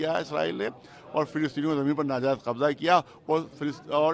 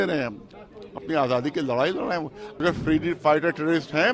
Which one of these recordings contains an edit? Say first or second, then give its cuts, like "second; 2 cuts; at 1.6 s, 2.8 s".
second; 1 cut; at 2.6 s